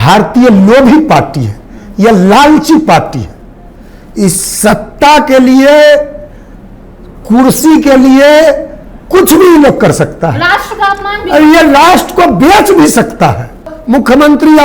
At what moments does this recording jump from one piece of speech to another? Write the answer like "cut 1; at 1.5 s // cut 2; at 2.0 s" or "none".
cut 1; at 13.7 s